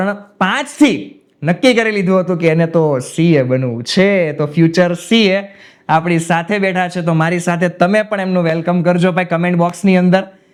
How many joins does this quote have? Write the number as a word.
zero